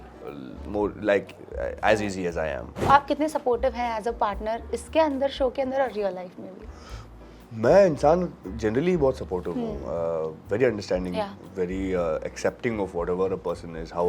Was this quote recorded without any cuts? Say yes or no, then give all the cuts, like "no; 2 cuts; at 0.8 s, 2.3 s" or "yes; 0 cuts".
no; 1 cut; at 2.9 s